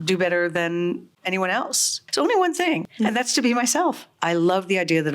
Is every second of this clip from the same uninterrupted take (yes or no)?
no